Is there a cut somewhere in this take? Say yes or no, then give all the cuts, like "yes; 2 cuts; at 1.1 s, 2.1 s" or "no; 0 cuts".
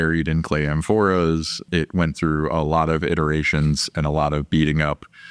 yes; 1 cut; at 1.6 s